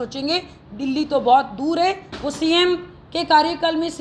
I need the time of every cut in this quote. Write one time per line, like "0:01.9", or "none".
0:02.1